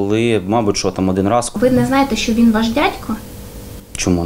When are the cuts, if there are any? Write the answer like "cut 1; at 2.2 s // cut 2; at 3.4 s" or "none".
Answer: cut 1; at 1.5 s